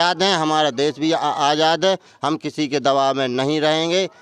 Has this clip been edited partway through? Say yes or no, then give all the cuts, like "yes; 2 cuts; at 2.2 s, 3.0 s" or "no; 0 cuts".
no; 0 cuts